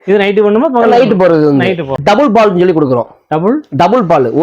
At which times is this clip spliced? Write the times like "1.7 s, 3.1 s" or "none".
1.9 s